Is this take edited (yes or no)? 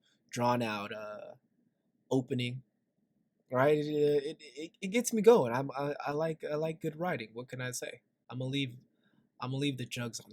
yes